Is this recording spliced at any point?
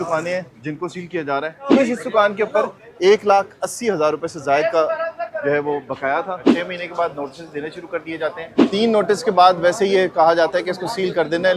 yes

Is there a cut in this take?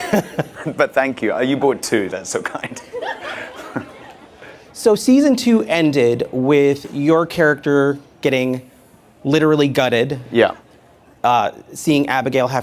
no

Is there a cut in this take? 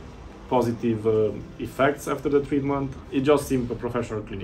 yes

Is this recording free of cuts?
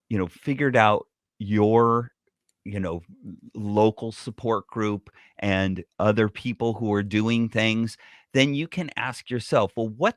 yes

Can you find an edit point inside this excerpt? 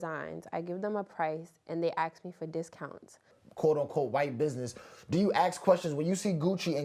yes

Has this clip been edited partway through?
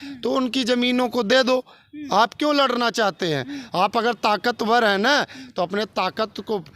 no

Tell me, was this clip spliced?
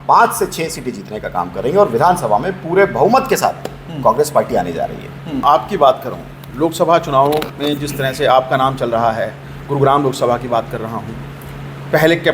yes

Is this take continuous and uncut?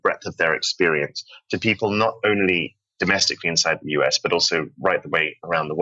yes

